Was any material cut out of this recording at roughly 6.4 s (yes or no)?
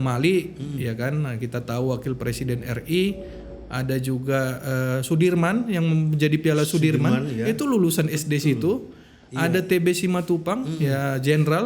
no